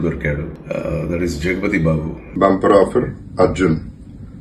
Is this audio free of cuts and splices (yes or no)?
no